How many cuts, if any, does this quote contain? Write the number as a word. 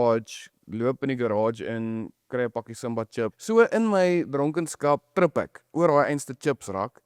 two